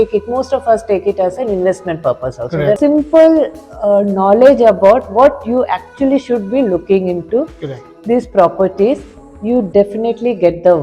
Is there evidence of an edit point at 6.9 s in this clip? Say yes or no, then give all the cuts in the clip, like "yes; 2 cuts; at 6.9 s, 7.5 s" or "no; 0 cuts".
no; 2 cuts; at 2.8 s, 9.1 s